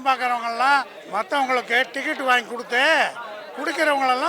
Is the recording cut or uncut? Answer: cut